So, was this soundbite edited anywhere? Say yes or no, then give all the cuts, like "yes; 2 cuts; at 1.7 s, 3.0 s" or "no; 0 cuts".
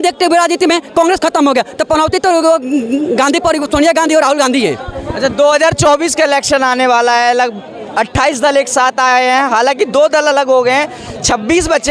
no; 0 cuts